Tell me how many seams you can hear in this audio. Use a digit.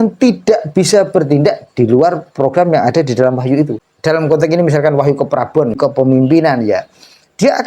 2